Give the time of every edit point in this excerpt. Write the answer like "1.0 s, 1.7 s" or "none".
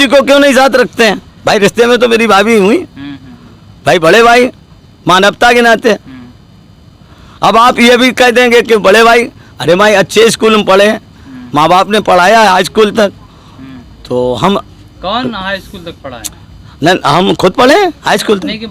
none